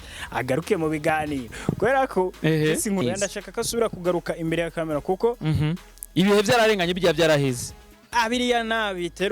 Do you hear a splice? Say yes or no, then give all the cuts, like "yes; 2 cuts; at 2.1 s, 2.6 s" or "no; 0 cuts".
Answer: yes; 1 cut; at 3.0 s